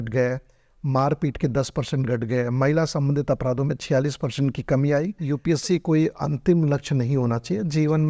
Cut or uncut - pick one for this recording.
cut